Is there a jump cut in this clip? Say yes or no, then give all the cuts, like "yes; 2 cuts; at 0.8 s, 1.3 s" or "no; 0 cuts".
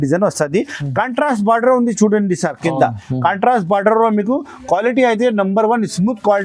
no; 0 cuts